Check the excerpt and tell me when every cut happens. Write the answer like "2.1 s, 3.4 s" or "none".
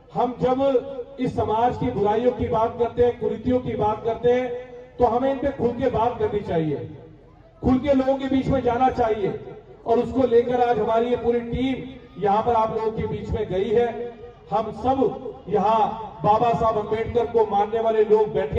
none